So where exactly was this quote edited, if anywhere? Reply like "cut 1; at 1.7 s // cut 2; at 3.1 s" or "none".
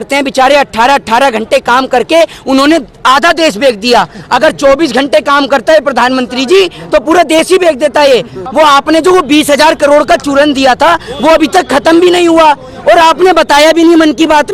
cut 1; at 8.4 s